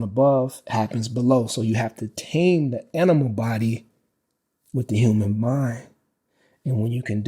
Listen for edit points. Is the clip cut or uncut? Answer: uncut